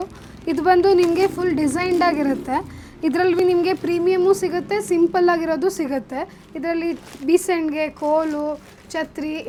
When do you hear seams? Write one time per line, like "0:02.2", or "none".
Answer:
none